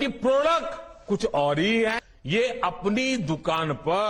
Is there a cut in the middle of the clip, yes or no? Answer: yes